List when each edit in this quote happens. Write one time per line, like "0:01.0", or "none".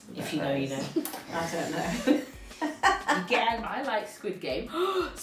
0:03.6